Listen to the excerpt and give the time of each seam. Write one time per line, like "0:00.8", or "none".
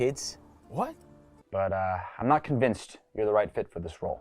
0:01.4